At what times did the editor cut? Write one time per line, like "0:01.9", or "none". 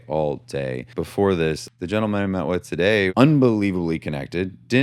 0:00.9
0:01.7
0:03.1